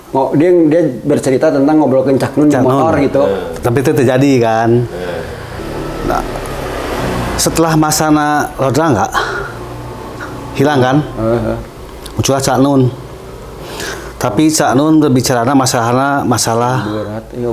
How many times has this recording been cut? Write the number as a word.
one